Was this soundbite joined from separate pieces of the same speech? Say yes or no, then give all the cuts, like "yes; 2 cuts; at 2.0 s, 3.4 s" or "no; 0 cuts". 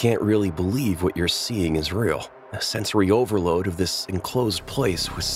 no; 0 cuts